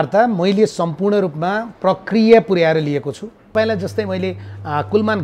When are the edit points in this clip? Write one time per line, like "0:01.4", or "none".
0:03.5